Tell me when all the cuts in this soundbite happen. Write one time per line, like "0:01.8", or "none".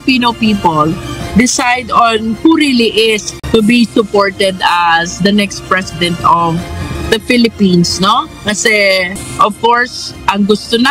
0:03.3
0:09.2

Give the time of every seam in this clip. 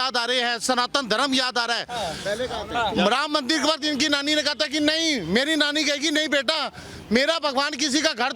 none

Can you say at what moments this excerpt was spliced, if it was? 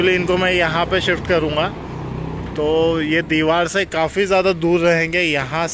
none

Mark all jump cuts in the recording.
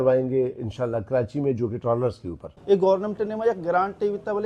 0:02.5

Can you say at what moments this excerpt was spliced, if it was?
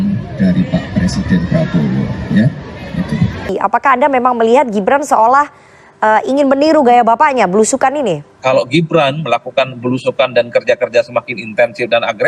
0:03.5
0:08.3

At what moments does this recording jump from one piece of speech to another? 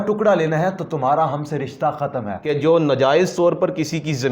0:02.4

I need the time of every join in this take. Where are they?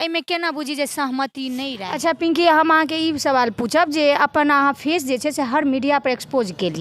0:01.8

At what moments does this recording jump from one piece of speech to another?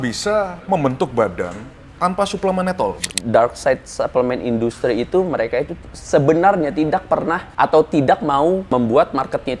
0:03.1
0:07.5
0:08.7

